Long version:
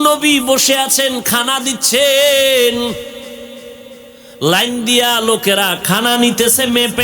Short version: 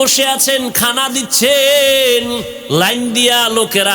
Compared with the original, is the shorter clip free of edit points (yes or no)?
no